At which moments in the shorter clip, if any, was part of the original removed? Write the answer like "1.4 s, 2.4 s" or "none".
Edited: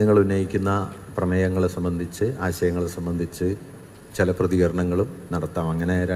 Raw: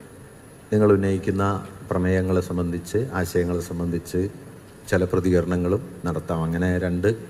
none